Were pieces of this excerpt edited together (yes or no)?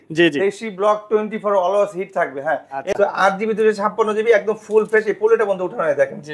yes